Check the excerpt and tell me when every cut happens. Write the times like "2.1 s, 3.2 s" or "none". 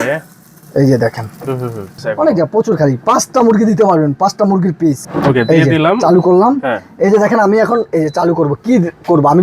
2.0 s, 5.1 s